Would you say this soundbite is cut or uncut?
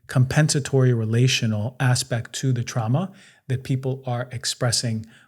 uncut